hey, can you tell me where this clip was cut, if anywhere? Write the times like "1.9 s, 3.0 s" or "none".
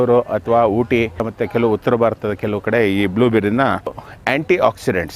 1.2 s, 4.0 s